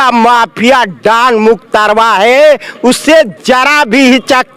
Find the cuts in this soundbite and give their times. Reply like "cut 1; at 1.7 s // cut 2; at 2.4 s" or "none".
none